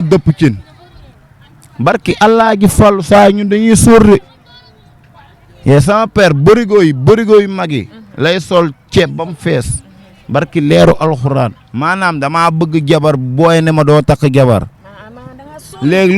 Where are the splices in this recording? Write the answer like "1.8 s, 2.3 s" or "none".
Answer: 11.7 s